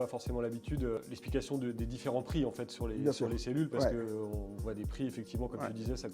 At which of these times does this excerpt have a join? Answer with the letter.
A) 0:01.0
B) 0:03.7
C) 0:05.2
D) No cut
A